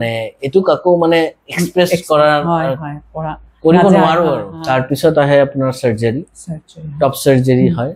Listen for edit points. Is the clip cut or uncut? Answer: cut